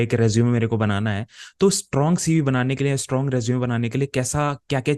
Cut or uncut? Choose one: uncut